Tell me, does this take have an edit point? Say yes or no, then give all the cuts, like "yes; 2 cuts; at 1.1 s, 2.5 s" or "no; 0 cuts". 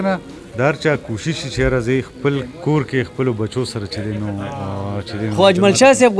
no; 0 cuts